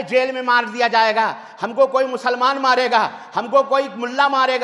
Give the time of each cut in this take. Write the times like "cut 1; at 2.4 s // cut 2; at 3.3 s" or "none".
none